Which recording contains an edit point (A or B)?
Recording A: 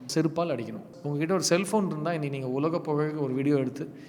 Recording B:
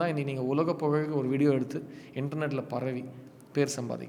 A